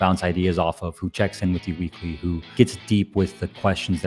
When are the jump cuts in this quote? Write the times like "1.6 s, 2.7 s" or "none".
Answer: 2.5 s

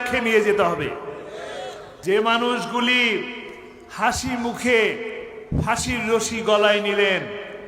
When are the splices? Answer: 1.9 s

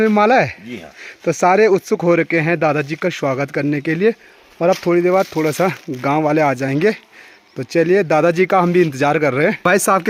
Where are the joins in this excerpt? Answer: none

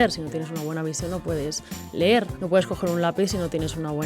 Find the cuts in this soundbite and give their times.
2.4 s

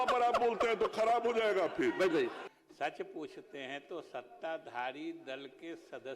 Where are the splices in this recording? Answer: 2.4 s

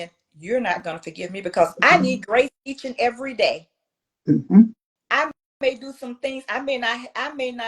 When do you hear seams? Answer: 4.8 s

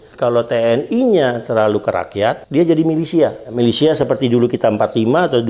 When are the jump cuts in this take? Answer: 2.4 s, 3.4 s

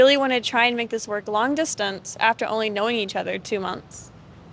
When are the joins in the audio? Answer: none

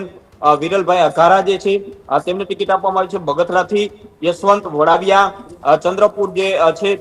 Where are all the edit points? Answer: none

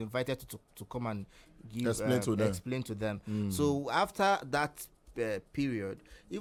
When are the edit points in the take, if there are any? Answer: none

